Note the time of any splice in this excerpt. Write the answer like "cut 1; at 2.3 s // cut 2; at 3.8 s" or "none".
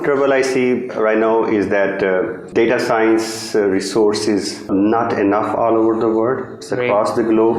cut 1; at 2.5 s // cut 2; at 4.7 s